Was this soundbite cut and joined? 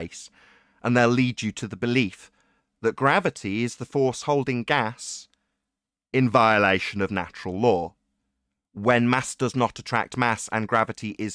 no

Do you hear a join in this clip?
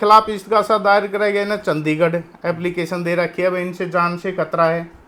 no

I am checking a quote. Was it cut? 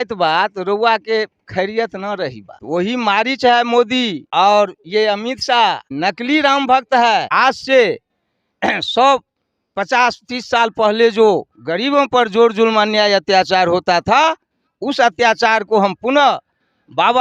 yes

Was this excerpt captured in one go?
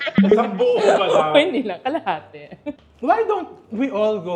no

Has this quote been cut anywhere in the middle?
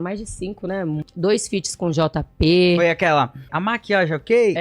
yes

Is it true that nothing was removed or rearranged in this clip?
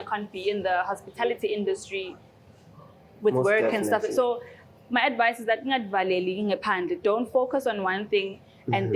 yes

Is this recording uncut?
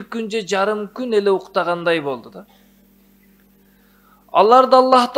yes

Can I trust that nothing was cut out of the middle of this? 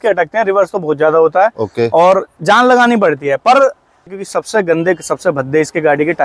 no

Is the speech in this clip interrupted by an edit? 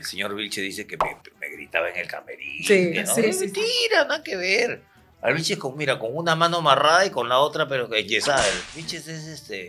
yes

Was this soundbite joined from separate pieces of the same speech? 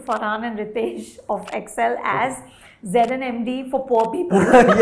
no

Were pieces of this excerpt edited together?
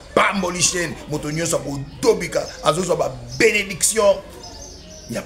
no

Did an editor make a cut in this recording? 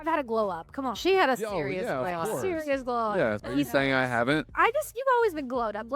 yes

